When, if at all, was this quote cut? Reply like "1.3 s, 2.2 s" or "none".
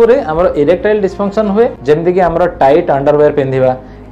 1.8 s